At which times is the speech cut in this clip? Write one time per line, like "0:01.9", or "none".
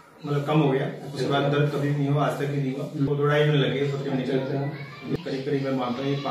0:03.1
0:05.1